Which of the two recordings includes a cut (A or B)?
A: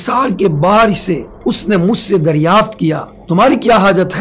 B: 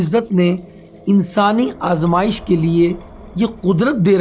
A